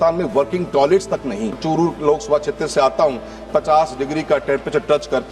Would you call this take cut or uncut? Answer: cut